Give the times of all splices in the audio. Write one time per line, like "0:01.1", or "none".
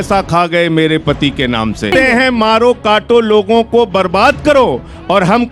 0:01.9